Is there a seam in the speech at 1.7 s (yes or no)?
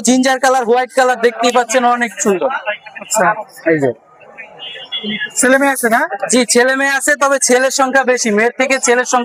no